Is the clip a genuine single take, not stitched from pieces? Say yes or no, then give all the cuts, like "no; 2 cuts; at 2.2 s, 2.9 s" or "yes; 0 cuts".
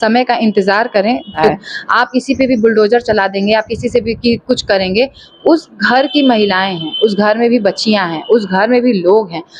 no; 1 cut; at 1.5 s